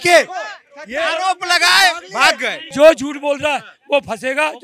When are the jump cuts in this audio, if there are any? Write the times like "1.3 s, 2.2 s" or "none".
2.6 s